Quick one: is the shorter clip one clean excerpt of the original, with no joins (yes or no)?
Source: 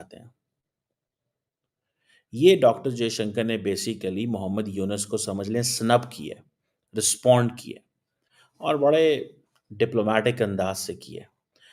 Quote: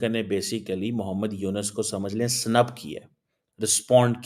yes